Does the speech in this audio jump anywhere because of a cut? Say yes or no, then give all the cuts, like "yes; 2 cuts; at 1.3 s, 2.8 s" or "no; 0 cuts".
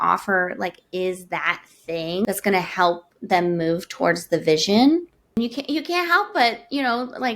yes; 2 cuts; at 2.2 s, 5.4 s